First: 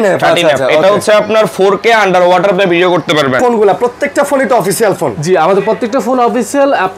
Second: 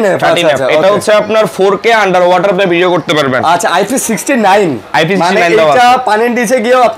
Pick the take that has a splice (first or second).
first